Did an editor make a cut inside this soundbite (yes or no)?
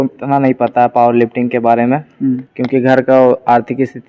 yes